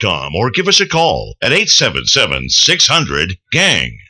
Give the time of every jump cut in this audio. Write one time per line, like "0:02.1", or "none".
0:01.3